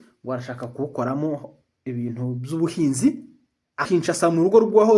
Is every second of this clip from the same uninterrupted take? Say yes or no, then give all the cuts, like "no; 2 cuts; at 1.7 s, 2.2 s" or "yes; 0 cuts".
no; 1 cut; at 3.8 s